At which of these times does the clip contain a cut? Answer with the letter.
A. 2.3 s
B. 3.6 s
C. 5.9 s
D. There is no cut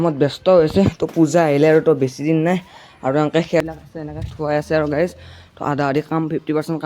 B